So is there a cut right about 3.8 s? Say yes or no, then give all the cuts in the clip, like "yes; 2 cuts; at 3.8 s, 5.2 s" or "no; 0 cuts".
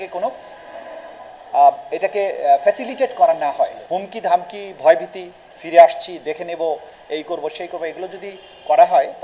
yes; 1 cut; at 3.8 s